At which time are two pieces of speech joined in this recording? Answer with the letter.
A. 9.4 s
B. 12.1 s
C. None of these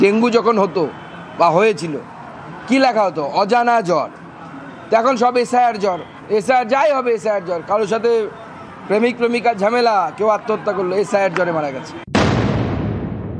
B